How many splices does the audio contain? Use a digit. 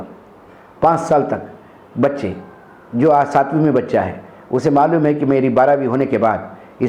0